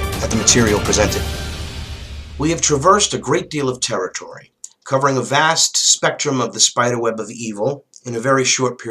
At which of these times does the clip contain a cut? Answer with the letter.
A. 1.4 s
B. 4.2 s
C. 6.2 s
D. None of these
C